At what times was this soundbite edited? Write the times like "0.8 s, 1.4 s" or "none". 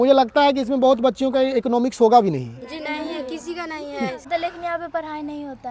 4.3 s